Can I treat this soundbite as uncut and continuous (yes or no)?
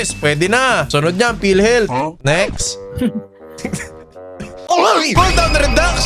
yes